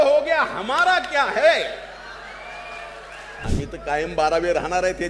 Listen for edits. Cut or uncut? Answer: cut